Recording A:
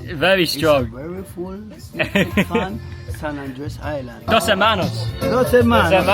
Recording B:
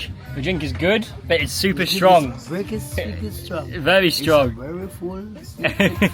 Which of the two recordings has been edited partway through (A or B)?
A